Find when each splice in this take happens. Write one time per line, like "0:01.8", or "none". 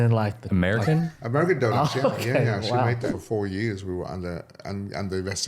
0:03.1